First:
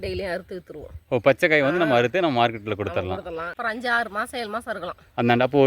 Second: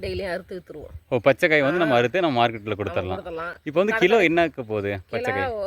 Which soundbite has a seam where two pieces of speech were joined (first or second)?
first